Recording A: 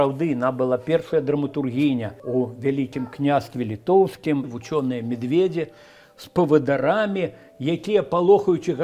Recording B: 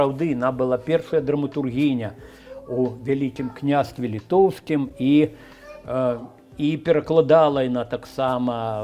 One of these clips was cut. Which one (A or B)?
A